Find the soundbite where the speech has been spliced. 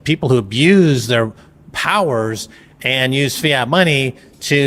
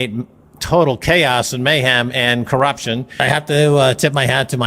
second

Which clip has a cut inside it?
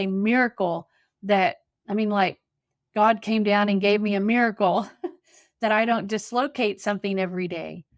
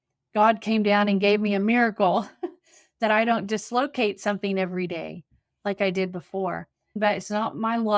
second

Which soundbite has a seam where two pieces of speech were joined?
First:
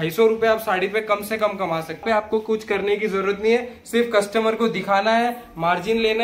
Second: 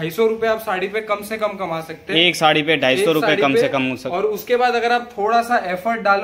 first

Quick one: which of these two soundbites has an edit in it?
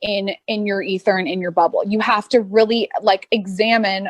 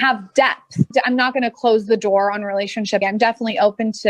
second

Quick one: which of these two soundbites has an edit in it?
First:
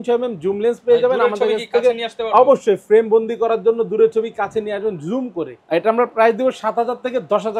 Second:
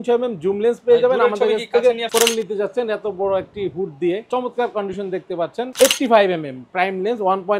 second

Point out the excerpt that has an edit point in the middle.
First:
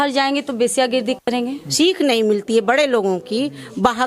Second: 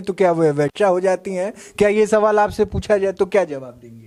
first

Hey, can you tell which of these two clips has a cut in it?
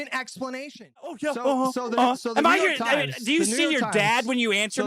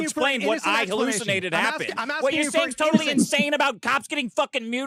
first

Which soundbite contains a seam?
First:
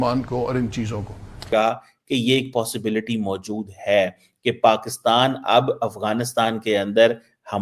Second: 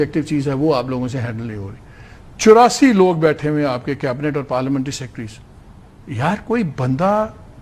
first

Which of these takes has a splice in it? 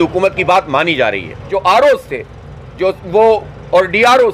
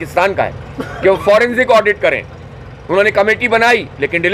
first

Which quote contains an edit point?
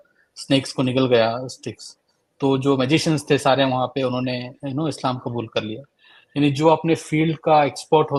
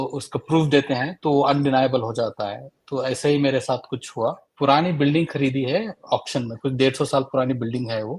second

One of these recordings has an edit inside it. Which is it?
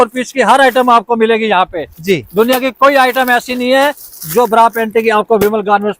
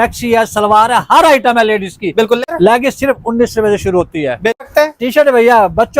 second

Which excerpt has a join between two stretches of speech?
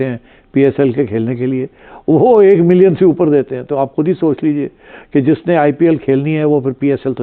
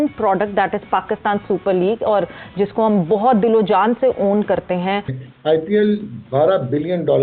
second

